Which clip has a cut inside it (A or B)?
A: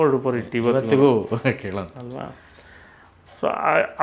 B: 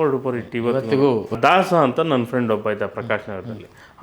B